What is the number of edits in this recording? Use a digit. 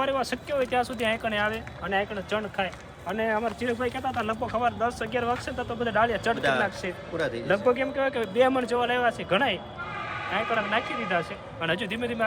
0